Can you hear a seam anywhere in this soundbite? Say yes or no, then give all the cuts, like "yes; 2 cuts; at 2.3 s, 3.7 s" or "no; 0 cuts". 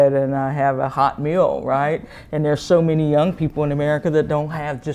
no; 0 cuts